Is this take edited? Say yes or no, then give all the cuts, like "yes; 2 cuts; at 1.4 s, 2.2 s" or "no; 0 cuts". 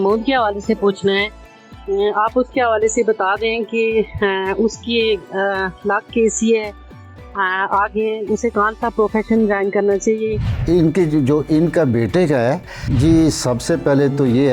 yes; 2 cuts; at 10.5 s, 12.8 s